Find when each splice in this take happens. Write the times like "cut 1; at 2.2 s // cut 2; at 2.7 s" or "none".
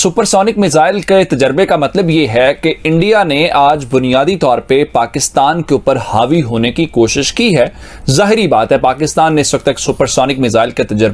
none